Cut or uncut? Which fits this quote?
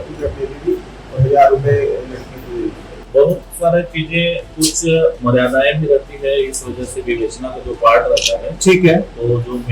uncut